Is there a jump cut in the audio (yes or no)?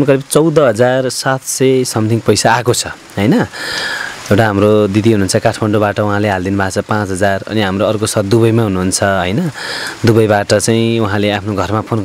no